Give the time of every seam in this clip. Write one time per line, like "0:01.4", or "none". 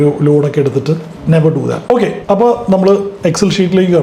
0:02.0

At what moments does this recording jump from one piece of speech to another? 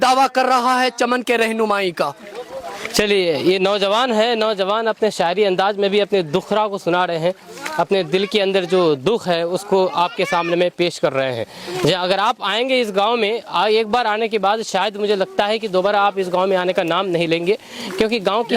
none

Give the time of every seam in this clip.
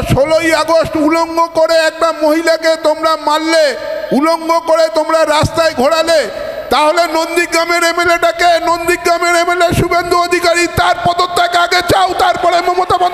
none

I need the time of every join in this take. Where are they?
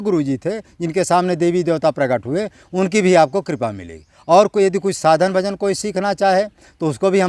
none

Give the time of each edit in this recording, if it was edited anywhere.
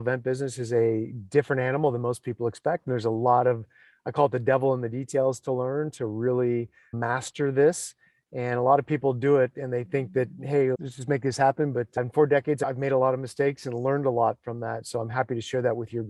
none

